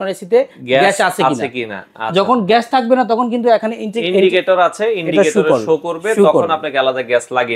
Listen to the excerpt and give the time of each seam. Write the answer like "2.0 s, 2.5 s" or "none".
none

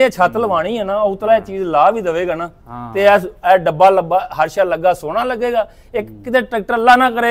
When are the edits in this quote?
none

